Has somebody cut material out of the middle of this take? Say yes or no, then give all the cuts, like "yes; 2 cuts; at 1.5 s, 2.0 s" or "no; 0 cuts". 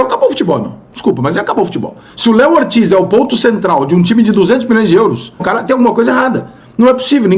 yes; 1 cut; at 5.5 s